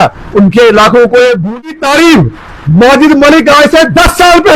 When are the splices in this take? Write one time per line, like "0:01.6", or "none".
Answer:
0:01.6